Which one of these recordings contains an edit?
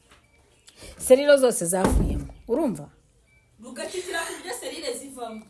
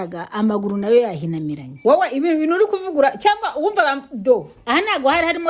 second; 1 cut; at 1.6 s

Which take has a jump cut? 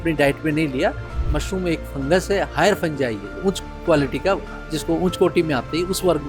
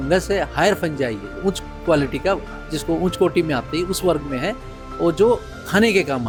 first; 1 cut; at 1.1 s

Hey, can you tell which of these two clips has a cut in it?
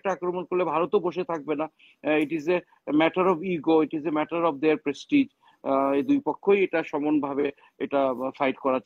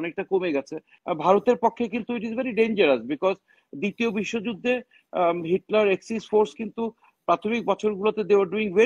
second; 1 cut; at 0.9 s

